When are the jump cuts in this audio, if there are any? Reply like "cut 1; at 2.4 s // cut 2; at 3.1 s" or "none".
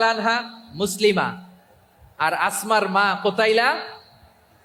none